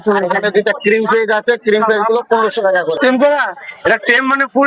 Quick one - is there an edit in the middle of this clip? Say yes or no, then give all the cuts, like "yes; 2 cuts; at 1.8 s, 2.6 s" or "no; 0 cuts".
yes; 1 cut; at 3.0 s